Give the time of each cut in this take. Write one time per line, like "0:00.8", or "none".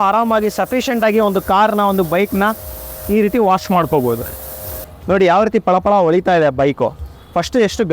none